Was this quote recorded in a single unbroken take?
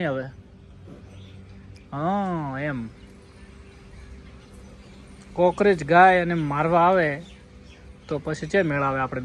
yes; 0 cuts

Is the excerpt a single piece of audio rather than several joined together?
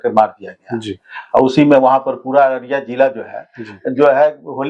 yes; 0 cuts

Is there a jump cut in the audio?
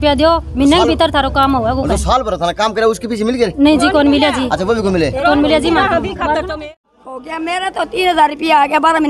yes; 1 cut; at 6.5 s

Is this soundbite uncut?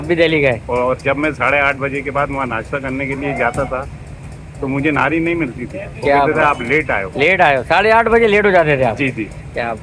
yes; 0 cuts

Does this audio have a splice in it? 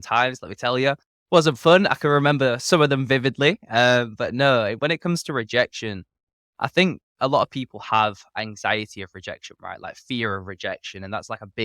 no; 0 cuts

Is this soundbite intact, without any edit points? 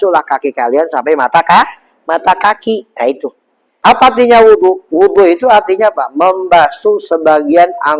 no; 1 cut; at 3.7 s

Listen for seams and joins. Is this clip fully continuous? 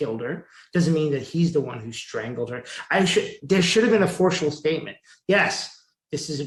yes; 0 cuts

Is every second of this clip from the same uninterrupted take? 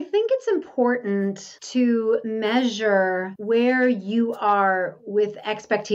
no; 3 cuts; at 1.5 s, 2.3 s, 3.3 s

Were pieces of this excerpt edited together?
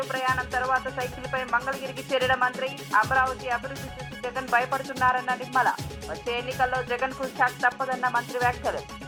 no; 0 cuts

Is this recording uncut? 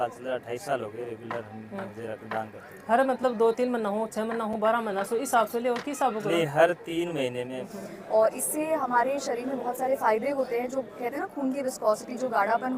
no; 1 cut; at 7.6 s

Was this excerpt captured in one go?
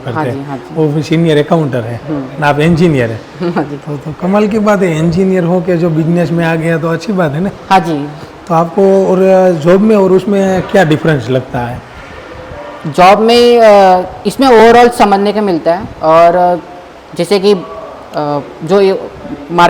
yes; 0 cuts

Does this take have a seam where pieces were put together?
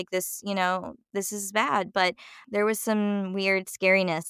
yes; 2 cuts; at 1.0 s, 2.4 s

